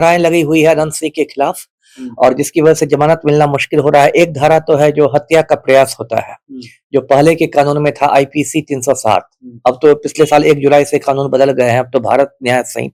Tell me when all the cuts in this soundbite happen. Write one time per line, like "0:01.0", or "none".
none